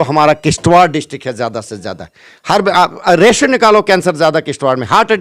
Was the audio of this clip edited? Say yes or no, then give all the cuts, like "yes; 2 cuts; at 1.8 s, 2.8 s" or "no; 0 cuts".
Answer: no; 0 cuts